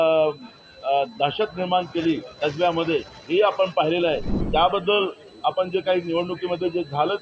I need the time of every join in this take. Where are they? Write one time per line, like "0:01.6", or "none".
0:04.3